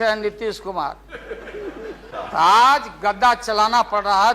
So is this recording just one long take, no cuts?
no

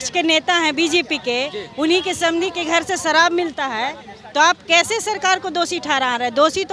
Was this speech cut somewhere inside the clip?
no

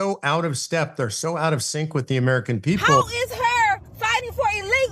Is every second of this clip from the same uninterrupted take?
no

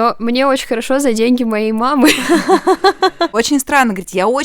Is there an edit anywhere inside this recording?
yes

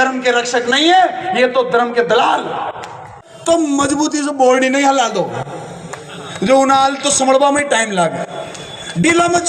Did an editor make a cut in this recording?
yes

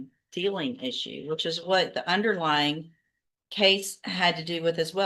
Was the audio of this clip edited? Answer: no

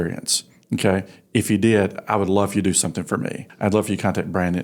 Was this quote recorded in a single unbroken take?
no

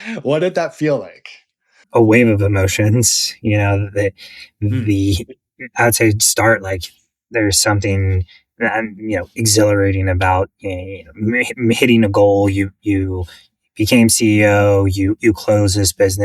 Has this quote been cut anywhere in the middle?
yes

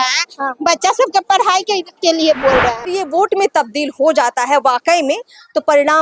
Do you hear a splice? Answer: yes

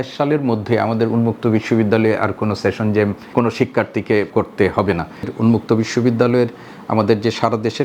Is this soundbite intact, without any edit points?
no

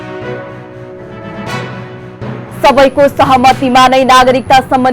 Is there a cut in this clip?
yes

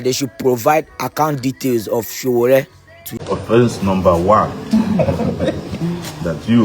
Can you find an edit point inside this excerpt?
yes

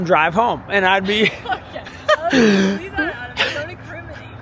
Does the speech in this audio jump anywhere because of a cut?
no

